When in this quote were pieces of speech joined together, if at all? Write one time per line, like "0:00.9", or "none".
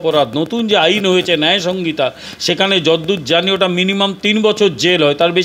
none

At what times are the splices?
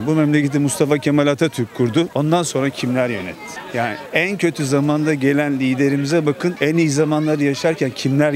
none

